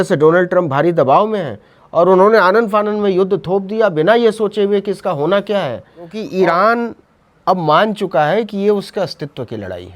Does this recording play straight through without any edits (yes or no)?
no